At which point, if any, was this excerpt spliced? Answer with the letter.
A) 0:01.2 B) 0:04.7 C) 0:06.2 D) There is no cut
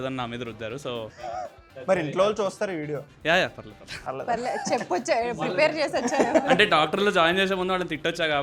A